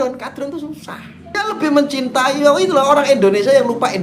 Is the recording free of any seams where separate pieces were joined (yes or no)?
no